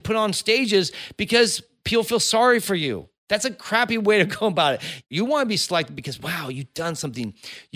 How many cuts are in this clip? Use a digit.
1